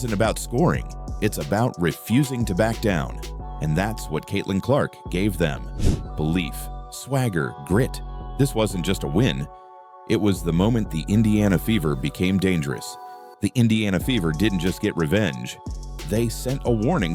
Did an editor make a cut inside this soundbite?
no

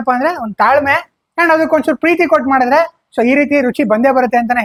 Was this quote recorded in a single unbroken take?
yes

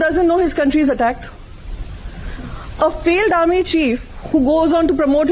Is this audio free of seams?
yes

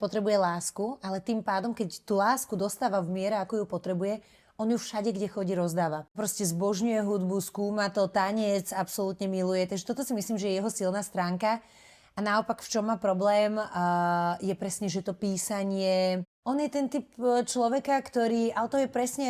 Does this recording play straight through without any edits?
no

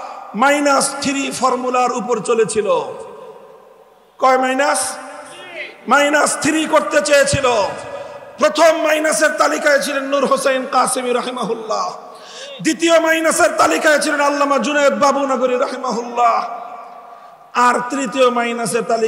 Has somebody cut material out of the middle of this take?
no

